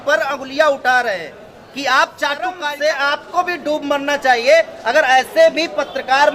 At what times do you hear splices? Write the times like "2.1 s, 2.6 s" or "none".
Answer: 2.6 s